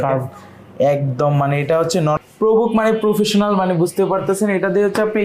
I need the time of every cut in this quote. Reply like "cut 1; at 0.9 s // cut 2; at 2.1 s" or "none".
cut 1; at 2.2 s